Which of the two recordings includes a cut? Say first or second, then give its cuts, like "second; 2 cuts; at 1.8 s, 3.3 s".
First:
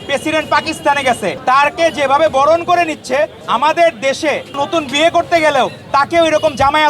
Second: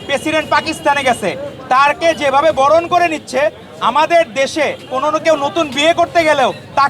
first; 3 cuts; at 1.4 s, 3.4 s, 4.6 s